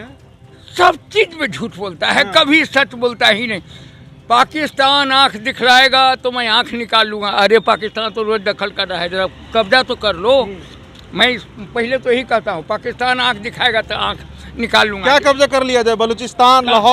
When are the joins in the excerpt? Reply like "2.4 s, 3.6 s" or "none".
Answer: none